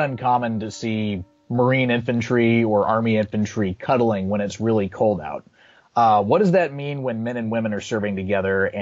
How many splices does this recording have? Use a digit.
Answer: 1